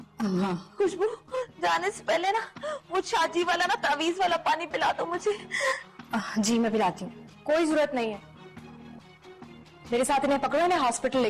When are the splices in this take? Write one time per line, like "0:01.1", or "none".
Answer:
none